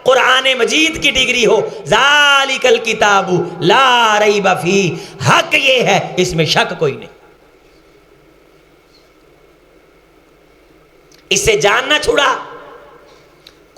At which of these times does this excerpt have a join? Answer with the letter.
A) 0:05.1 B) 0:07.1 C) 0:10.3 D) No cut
D